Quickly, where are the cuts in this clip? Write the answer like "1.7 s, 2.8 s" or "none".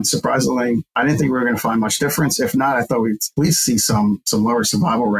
none